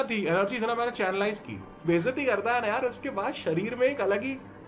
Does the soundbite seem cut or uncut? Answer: cut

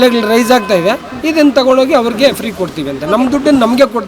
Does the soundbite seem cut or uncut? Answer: uncut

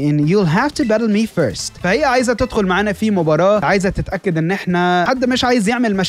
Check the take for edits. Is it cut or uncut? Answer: cut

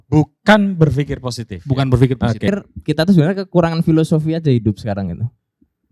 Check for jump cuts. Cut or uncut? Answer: cut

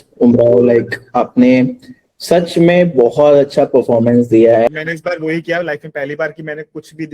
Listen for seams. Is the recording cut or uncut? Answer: cut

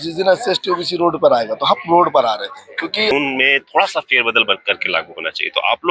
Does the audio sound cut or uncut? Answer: cut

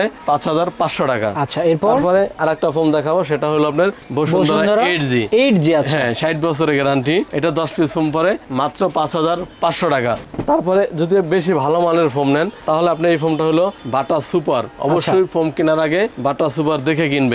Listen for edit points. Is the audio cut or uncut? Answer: uncut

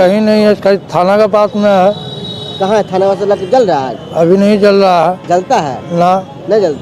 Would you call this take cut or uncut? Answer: uncut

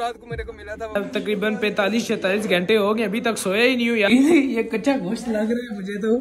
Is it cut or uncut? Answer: cut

